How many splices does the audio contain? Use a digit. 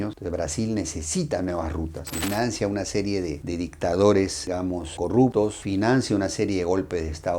1